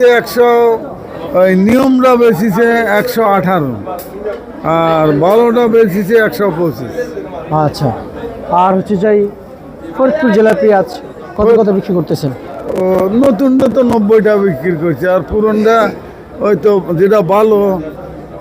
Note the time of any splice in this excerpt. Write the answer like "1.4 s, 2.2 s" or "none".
1.2 s